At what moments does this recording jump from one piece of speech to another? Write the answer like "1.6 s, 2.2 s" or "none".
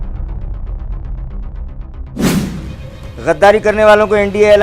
none